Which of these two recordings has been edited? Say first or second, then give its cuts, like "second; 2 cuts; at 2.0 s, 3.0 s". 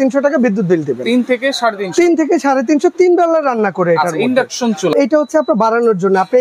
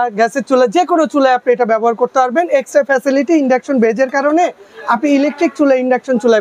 first; 1 cut; at 4.9 s